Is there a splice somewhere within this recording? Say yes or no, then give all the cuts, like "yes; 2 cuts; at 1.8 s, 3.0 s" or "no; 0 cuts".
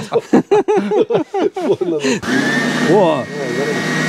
yes; 1 cut; at 2.2 s